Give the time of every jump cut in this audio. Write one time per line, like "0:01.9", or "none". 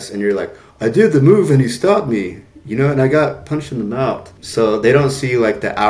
0:04.4